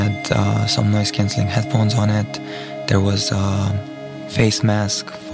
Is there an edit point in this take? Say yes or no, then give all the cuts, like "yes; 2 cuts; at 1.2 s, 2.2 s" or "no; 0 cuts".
no; 0 cuts